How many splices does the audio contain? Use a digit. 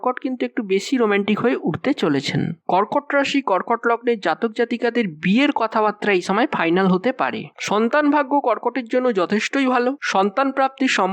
1